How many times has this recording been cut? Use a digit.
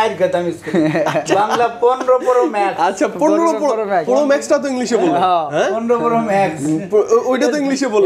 0